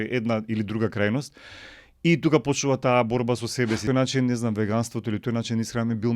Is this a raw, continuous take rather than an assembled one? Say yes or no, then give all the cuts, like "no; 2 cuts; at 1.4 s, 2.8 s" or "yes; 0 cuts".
no; 1 cut; at 3.8 s